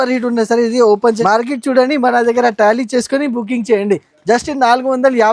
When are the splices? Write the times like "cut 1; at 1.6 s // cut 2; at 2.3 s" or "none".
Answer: cut 1; at 1.2 s